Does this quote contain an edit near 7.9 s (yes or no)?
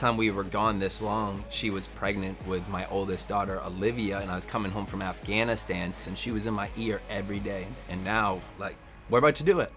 yes